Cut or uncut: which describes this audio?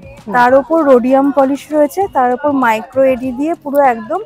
uncut